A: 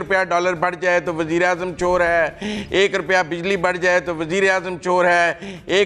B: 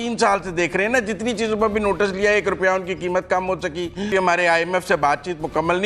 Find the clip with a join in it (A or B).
B